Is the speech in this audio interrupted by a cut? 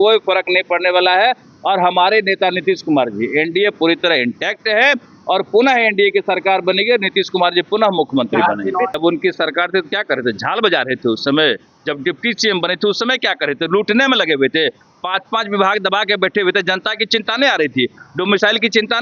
yes; 1 cut; at 9.0 s

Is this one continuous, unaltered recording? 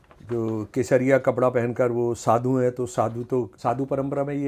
no; 1 cut; at 3.5 s

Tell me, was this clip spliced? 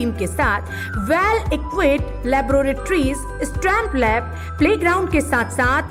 no; 0 cuts

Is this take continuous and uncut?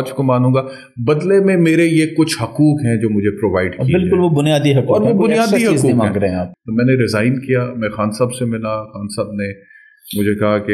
no; 1 cut; at 6.5 s

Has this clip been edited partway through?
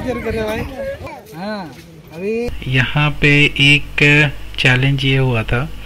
yes; 2 cuts; at 1.1 s, 2.5 s

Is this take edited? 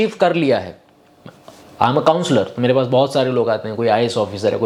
no; 0 cuts

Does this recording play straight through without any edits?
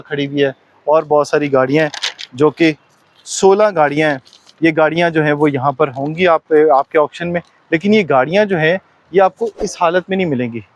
yes; 0 cuts

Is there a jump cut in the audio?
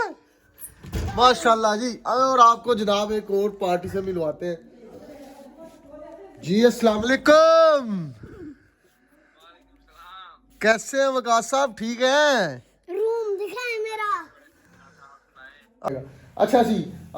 yes; 1 cut; at 15.9 s

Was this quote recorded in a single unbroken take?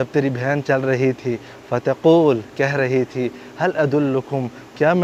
yes; 0 cuts

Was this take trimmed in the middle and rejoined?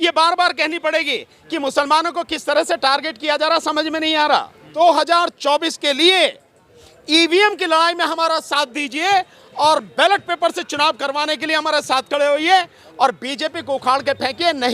yes; 1 cut; at 4.6 s

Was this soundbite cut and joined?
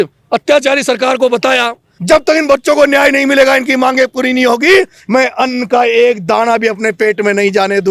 yes; 1 cut; at 1.9 s

